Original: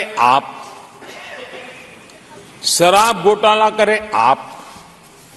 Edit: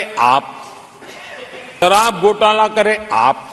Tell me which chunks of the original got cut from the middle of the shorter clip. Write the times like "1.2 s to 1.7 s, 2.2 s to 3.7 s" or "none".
1.8 s to 2.8 s